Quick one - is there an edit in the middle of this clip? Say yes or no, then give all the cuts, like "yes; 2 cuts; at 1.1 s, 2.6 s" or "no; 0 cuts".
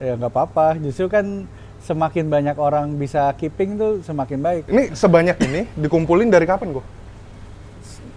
yes; 1 cut; at 4.6 s